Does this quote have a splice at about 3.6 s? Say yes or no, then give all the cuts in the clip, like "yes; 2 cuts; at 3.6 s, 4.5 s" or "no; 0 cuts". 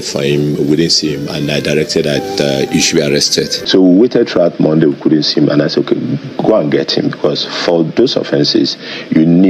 yes; 1 cut; at 3.6 s